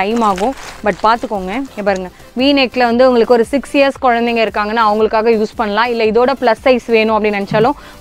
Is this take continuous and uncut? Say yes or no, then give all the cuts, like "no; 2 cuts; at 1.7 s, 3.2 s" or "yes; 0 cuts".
no; 1 cut; at 1.7 s